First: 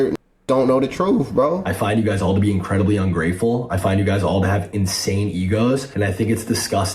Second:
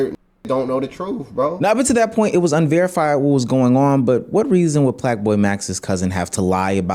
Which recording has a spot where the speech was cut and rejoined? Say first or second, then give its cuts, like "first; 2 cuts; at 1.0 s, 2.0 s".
first; 2 cuts; at 1.5 s, 5.9 s